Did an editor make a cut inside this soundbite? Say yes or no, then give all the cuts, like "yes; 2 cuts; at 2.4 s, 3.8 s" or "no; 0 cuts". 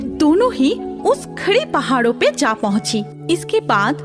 yes; 1 cut; at 3.1 s